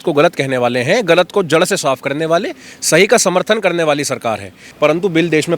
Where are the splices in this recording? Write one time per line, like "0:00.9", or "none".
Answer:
0:04.6